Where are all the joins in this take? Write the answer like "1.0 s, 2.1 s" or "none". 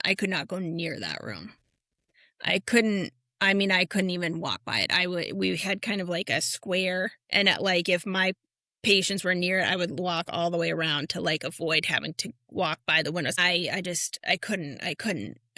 13.4 s